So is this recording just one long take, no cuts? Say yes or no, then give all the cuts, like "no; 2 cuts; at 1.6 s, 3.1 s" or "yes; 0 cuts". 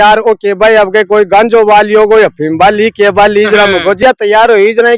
no; 1 cut; at 4.0 s